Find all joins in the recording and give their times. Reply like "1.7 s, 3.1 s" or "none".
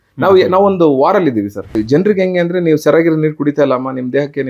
1.7 s